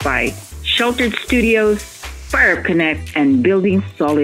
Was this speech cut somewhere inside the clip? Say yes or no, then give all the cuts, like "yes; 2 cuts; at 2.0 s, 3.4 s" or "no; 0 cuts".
no; 0 cuts